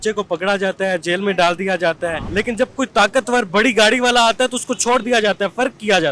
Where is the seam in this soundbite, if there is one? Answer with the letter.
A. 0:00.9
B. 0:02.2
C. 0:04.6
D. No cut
B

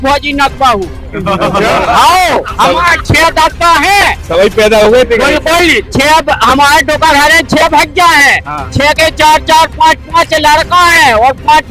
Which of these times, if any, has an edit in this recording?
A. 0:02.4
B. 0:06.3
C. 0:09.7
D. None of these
D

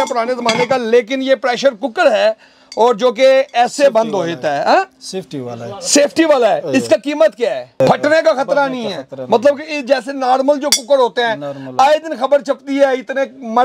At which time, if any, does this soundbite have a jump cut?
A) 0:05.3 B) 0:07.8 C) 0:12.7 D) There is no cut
B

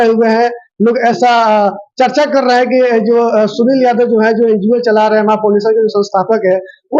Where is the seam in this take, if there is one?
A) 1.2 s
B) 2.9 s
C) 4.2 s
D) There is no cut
D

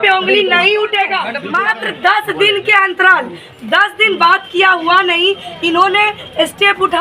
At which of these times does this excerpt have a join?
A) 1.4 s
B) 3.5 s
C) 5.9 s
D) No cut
A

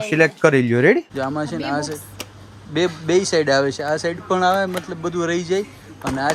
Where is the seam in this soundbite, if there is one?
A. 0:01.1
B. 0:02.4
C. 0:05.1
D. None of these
A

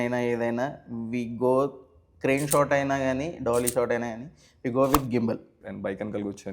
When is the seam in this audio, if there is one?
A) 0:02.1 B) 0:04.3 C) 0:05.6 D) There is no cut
C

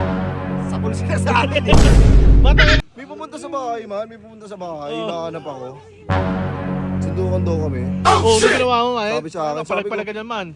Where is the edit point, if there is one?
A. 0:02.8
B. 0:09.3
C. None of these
A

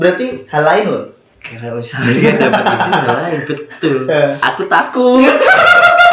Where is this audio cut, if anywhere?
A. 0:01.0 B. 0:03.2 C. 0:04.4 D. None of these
C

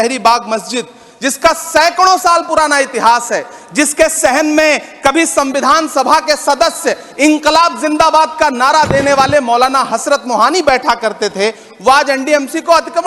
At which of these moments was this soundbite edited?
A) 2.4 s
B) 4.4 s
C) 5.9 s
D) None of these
D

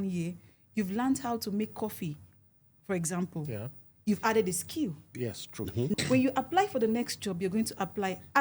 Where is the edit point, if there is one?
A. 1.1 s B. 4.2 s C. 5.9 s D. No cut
C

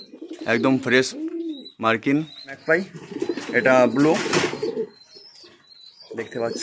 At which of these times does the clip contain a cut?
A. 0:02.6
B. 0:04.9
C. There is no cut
A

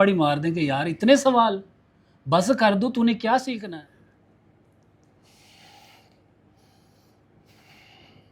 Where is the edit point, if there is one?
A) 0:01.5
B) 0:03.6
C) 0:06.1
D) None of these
B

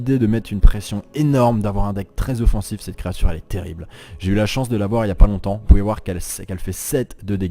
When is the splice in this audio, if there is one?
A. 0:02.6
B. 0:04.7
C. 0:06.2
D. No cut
A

